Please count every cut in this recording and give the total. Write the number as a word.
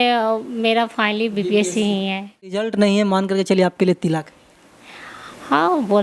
one